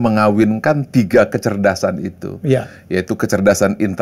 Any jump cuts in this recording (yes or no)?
no